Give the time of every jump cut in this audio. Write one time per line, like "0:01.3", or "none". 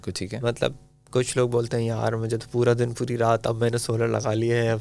none

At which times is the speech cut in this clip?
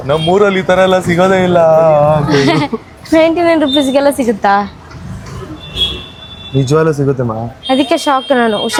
none

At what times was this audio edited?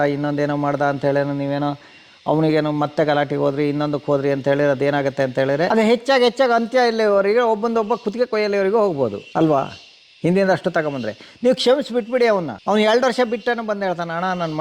0:05.7
0:09.2
0:12.5

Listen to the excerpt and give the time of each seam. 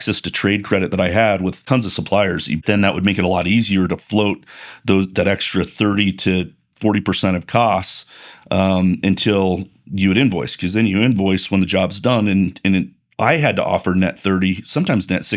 0:01.6
0:02.6

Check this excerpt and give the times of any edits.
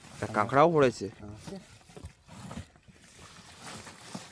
none

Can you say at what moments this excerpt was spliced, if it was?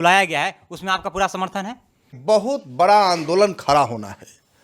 0:02.2

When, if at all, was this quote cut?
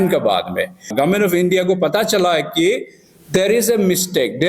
0:00.9

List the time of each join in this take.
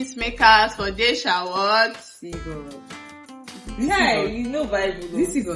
none

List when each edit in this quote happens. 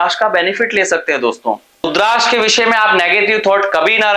0:01.8

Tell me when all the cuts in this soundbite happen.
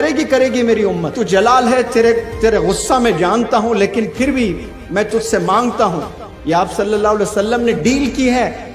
0:01.2

